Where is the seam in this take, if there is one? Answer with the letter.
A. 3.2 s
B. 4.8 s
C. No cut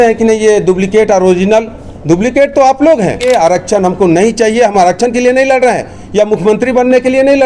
A